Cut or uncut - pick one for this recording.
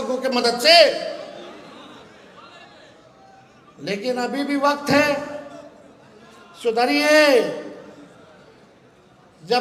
uncut